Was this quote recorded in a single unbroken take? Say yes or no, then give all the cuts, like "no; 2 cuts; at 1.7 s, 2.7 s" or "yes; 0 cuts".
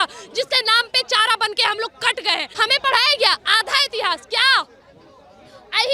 no; 1 cut; at 2.5 s